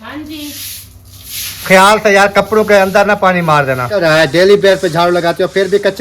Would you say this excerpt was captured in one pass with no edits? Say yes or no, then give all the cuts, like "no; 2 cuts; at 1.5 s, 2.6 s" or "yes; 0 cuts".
no; 1 cut; at 4.0 s